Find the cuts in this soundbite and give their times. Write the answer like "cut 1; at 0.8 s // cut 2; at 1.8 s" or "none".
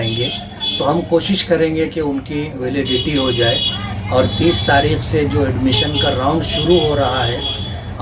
none